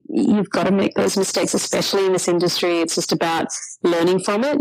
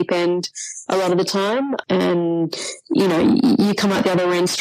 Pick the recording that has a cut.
second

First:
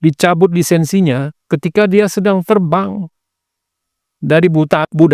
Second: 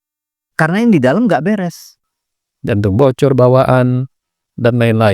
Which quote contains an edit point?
second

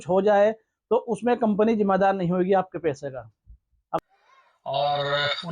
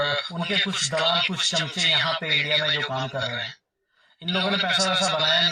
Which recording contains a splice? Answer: first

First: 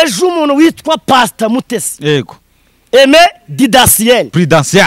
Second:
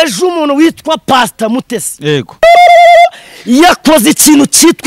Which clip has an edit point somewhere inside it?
second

